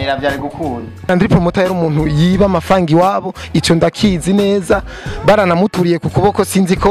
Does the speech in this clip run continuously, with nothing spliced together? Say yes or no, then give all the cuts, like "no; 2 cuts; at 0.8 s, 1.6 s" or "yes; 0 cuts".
no; 1 cut; at 1.1 s